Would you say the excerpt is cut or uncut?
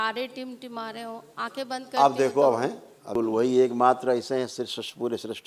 cut